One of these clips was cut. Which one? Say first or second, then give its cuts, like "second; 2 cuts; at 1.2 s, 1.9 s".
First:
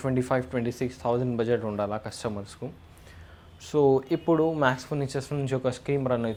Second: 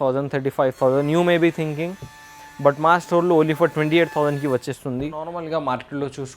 second; 1 cut; at 5.4 s